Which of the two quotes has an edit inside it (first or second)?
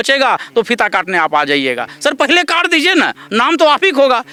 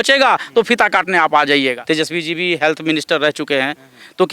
second